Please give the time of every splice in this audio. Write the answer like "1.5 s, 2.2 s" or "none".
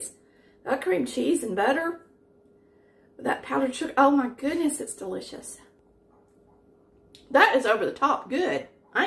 5.8 s